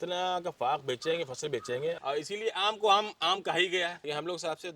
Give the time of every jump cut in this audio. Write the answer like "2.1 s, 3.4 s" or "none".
2.0 s, 3.9 s